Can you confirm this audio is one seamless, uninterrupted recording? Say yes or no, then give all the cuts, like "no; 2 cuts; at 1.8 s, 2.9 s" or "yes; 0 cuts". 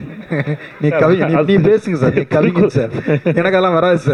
yes; 0 cuts